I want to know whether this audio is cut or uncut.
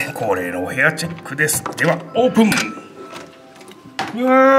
uncut